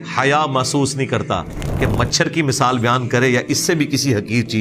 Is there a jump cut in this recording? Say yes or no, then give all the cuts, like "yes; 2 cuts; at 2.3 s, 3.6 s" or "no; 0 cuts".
no; 0 cuts